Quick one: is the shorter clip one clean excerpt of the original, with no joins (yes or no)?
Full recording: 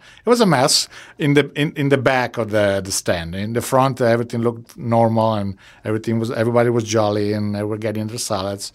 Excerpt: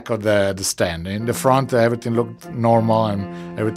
yes